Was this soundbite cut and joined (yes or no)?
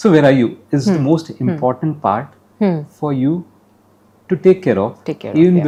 no